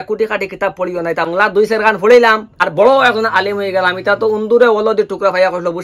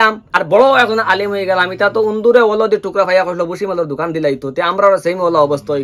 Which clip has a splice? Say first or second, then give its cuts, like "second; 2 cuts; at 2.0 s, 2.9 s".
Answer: first; 1 cut; at 1.3 s